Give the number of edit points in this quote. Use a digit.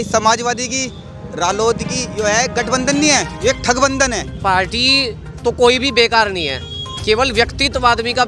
1